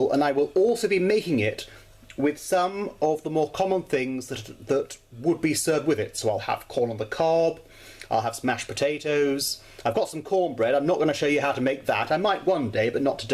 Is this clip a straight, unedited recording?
yes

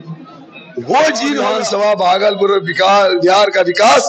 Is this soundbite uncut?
no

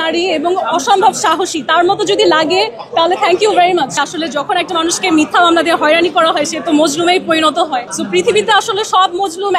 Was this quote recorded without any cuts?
no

